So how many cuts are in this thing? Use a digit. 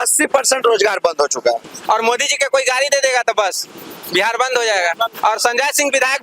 2